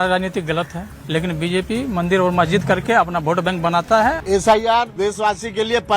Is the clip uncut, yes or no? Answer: no